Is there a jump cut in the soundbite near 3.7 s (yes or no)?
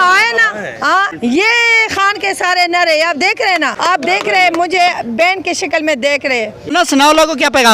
yes